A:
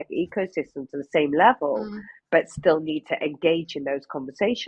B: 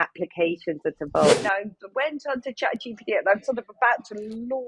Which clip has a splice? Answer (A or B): B